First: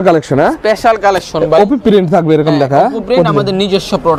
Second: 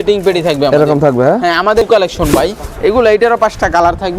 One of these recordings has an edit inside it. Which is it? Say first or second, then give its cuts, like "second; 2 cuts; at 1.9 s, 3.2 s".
second; 1 cut; at 1.9 s